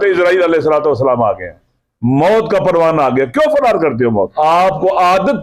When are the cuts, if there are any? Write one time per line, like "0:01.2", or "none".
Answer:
0:04.3